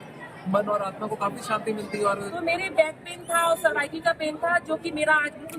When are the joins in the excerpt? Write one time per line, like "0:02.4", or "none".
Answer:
0:02.3